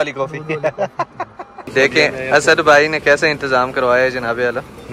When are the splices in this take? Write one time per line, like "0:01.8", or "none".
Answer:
0:01.7

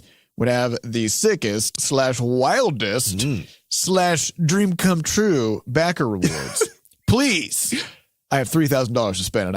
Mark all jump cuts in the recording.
0:01.7

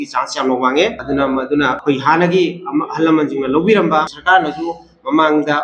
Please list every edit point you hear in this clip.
none

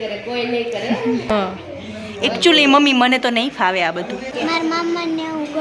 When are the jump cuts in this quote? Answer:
0:01.3
0:04.3

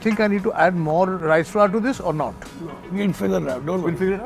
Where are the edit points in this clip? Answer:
0:01.2

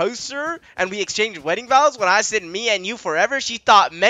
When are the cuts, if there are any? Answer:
none

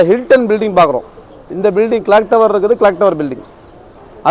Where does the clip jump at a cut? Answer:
none

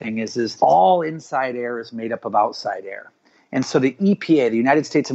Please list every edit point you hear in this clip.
none

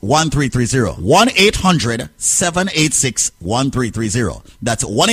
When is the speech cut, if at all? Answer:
0:01.0

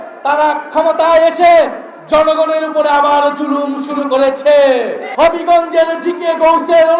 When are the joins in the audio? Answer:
0:05.0

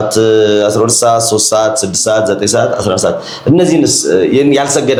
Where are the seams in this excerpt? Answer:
none

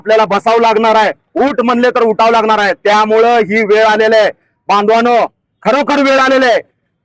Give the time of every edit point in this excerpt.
none

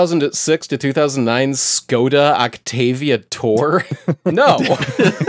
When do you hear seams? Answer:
none

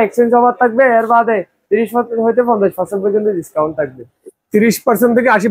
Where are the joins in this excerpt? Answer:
none

